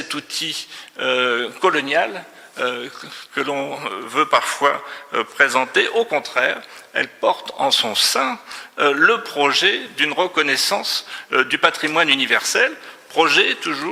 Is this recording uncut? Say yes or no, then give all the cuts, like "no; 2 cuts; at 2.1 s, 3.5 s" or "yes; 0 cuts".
yes; 0 cuts